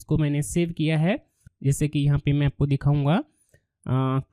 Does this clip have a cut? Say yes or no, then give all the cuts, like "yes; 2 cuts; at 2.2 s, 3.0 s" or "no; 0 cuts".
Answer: yes; 1 cut; at 1.5 s